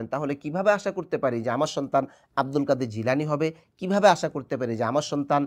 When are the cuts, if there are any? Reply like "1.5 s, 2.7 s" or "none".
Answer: none